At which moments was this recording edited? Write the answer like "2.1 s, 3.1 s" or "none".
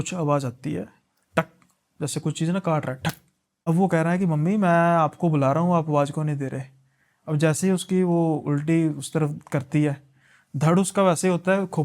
3.7 s